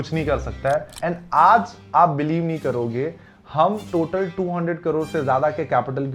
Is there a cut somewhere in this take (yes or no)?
yes